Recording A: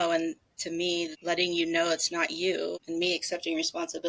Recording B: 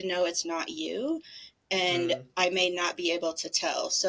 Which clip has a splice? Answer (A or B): A